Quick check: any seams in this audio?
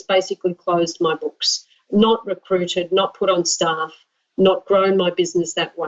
no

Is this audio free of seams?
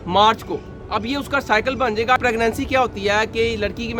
no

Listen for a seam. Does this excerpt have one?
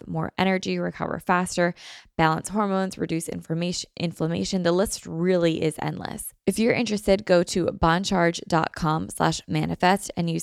yes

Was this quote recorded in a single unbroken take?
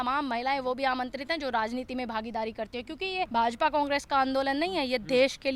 no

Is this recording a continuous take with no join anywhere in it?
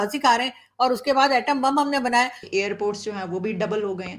no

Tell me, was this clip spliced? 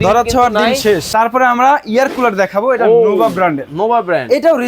yes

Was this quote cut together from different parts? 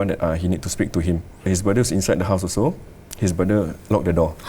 yes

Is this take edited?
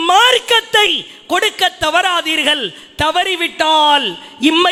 no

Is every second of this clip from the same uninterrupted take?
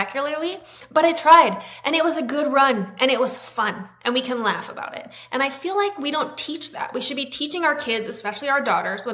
yes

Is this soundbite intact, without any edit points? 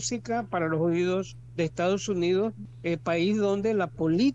no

